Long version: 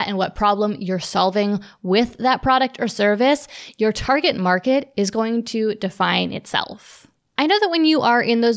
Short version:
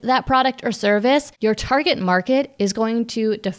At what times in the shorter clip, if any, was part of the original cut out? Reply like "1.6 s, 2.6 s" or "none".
1.3 s